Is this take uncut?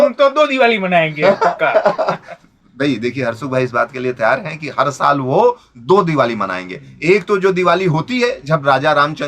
yes; 0 cuts

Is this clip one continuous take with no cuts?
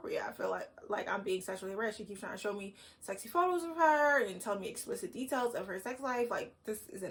yes; 0 cuts

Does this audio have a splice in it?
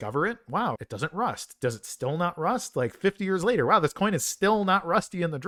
no; 0 cuts

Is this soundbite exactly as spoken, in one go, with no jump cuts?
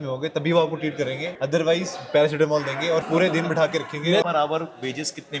no; 3 cuts; at 1.3 s, 3.1 s, 4.2 s

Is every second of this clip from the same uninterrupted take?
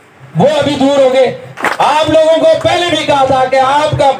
no; 1 cut; at 1.5 s

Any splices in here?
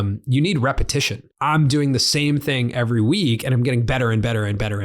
yes; 1 cut; at 1.2 s

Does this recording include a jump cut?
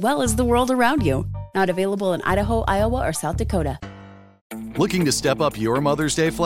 yes; 1 cut; at 4.5 s

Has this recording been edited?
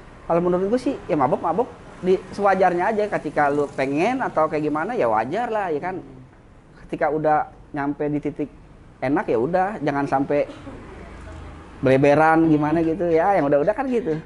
no; 0 cuts

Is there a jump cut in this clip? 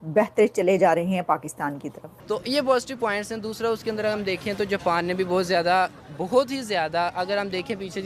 yes; 1 cut; at 1.7 s

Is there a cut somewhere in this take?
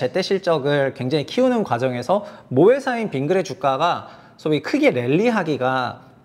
no; 0 cuts

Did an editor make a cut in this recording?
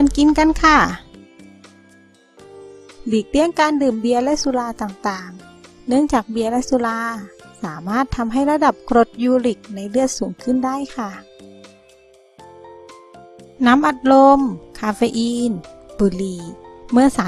no; 0 cuts

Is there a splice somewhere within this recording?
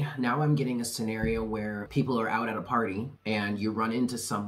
yes; 2 cuts; at 1.8 s, 3.1 s

